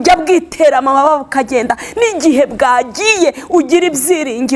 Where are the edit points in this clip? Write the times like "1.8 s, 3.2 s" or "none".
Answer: none

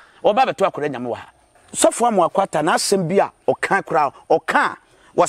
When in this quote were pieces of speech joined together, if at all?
1.6 s

